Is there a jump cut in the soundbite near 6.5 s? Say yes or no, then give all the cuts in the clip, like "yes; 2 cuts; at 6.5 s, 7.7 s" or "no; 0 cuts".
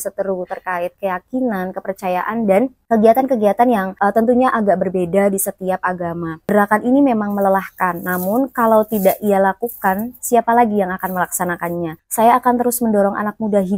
yes; 2 cuts; at 6.5 s, 12.0 s